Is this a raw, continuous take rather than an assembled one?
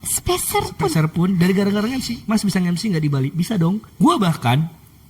no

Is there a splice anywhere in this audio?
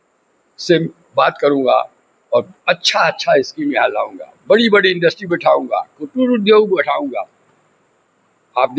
no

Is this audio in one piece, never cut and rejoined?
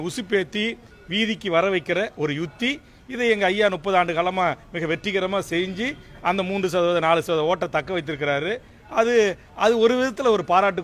yes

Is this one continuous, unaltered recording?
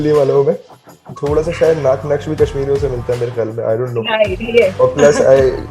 no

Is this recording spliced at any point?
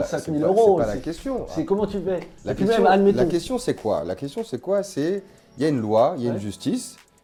no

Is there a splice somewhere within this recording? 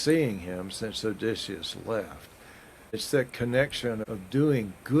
yes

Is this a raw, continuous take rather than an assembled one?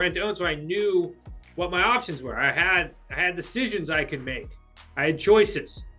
yes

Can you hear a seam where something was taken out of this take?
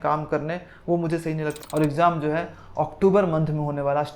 yes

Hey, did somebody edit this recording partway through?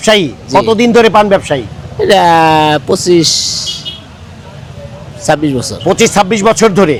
no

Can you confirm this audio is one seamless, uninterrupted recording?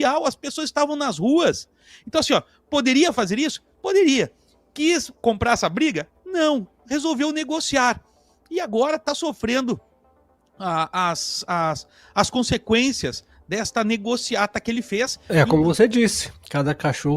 no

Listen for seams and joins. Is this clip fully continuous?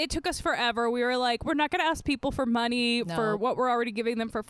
yes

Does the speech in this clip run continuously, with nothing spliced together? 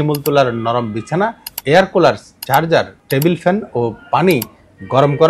no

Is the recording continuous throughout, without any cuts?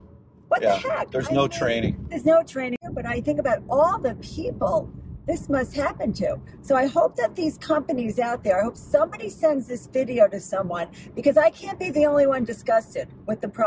no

